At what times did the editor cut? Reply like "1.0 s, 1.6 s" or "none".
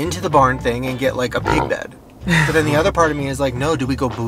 none